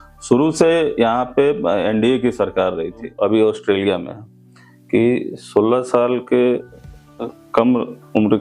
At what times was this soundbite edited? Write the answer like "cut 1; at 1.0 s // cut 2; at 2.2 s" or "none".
cut 1; at 3.1 s